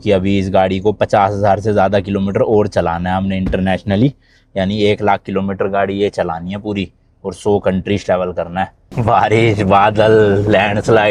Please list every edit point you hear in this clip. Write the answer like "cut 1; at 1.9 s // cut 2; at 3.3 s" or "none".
cut 1; at 8.9 s